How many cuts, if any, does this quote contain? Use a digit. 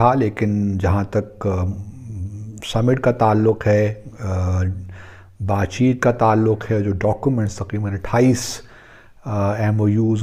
0